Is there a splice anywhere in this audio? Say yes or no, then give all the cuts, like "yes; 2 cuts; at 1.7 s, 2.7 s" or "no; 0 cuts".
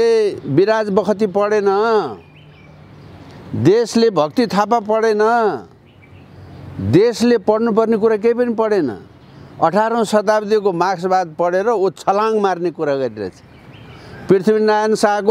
no; 0 cuts